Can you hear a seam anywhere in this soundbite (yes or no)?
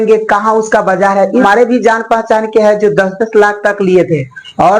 yes